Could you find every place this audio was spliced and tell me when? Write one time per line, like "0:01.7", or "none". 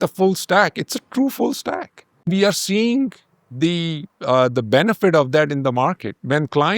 0:02.3